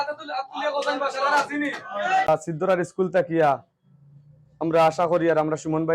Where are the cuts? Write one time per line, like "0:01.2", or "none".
0:02.3